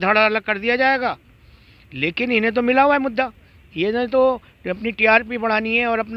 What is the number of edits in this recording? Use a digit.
0